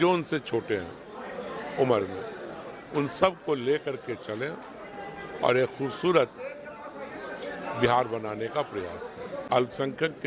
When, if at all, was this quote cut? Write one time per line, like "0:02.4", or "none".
0:09.3